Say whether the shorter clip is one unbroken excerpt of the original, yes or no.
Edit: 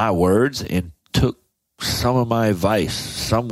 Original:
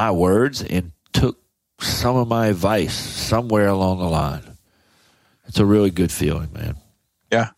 yes